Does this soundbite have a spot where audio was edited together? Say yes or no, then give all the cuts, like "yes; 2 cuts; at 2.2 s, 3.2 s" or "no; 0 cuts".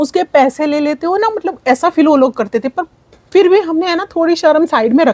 no; 0 cuts